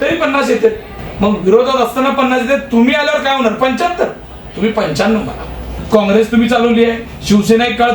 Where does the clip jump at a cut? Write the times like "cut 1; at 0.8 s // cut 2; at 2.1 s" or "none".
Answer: cut 1; at 5.8 s